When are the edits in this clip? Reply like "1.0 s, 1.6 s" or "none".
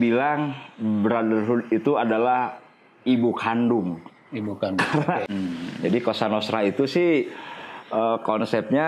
5.3 s